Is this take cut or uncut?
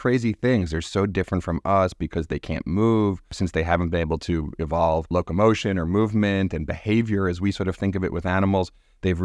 cut